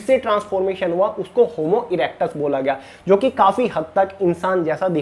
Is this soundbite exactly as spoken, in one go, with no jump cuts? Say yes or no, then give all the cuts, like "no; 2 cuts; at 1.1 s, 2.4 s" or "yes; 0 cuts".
yes; 0 cuts